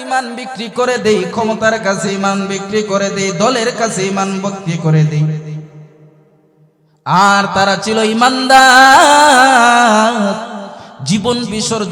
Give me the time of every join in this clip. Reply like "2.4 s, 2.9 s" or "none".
none